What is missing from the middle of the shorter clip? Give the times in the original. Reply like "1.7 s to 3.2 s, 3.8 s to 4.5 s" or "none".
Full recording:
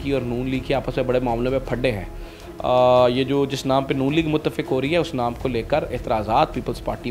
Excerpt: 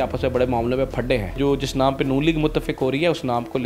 2.1 s to 3.3 s

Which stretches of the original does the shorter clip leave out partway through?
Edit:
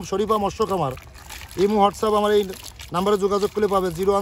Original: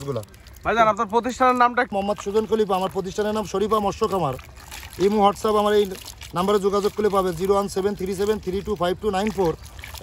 none

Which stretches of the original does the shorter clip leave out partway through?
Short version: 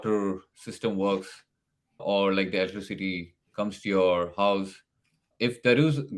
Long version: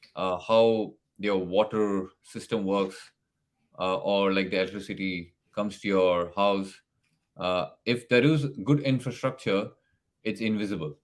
3.7 s to 4.0 s, 7.3 s to 7.7 s

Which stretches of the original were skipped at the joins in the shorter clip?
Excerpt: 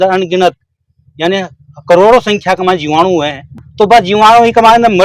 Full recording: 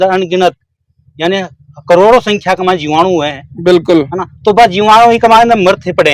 3.5 s to 4.2 s

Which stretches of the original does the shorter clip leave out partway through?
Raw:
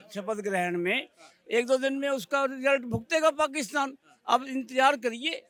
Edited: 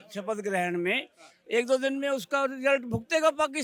none

